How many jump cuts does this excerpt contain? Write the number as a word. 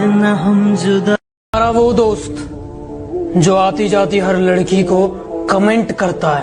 zero